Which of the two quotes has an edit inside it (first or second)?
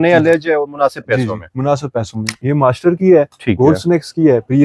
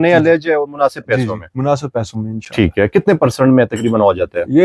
first